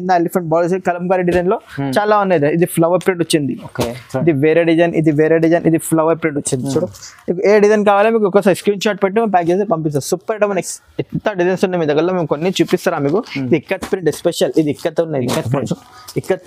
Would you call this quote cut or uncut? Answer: cut